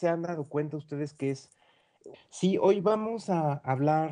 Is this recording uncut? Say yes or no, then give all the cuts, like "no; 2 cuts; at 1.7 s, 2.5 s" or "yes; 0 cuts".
yes; 0 cuts